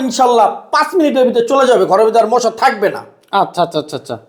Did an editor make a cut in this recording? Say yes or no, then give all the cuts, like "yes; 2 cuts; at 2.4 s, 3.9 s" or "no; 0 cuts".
no; 0 cuts